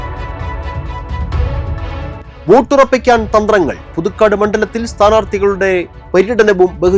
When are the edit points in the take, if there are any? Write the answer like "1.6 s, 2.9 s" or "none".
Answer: 2.3 s